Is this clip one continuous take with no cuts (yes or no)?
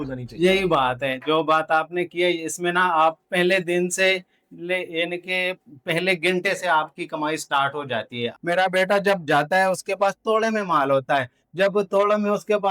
no